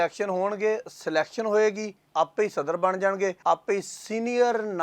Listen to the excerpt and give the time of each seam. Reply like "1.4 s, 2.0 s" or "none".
1.9 s, 3.4 s